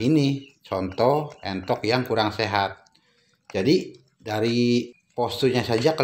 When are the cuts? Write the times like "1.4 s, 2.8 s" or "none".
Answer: 5.0 s